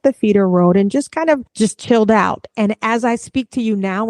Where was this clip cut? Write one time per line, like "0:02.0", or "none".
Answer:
0:01.5